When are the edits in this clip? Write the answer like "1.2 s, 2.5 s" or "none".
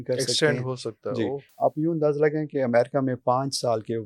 1.5 s